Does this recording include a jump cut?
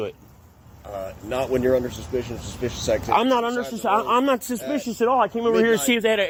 no; 0 cuts

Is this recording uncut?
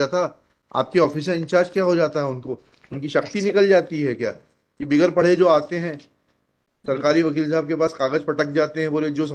yes; 0 cuts

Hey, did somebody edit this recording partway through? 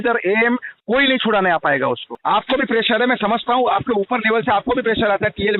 yes; 1 cut; at 2.1 s

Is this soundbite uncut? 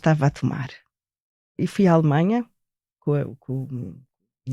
no; 2 cuts; at 1.5 s, 3.0 s

